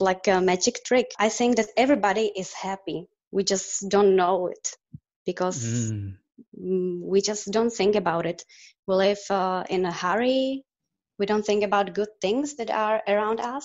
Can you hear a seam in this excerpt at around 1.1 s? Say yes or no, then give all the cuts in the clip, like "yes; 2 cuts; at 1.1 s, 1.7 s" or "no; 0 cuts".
yes; 1 cut; at 1.1 s